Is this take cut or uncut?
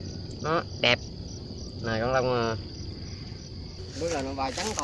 cut